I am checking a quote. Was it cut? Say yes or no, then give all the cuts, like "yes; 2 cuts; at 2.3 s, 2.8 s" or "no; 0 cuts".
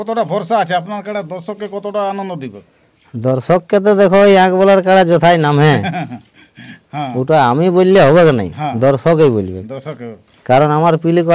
no; 0 cuts